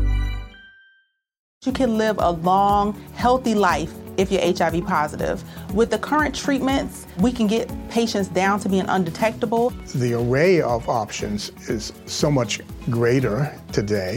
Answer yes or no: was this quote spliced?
yes